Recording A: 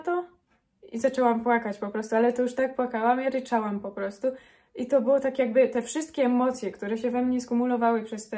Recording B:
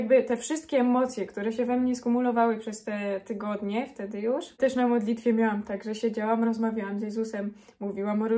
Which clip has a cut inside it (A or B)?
B